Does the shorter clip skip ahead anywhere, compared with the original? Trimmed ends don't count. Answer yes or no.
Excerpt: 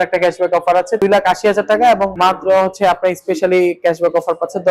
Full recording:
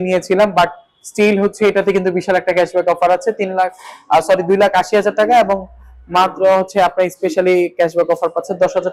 yes